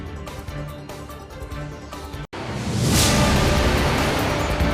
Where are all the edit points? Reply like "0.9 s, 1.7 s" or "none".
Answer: 2.2 s